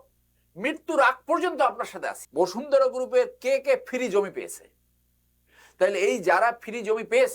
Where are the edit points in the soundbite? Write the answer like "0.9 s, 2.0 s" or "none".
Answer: 2.2 s